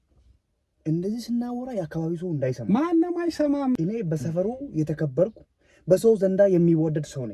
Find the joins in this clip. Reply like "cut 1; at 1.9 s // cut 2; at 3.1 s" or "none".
cut 1; at 3.8 s